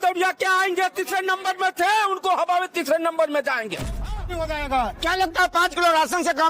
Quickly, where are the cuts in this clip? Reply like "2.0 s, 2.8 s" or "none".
4.0 s